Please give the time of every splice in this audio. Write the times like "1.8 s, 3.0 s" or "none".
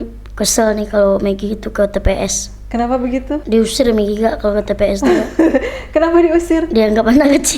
3.4 s